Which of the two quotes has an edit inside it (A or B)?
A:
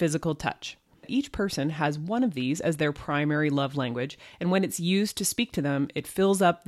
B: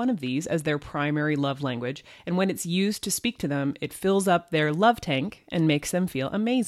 A